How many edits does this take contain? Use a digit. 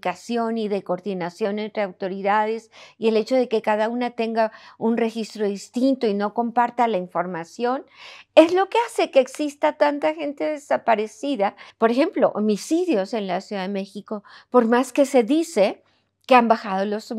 1